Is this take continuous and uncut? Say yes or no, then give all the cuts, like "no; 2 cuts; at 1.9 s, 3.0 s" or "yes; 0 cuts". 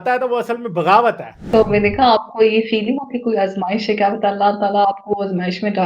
no; 1 cut; at 1.3 s